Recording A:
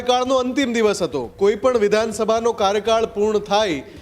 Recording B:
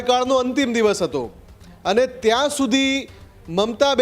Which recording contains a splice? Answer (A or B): A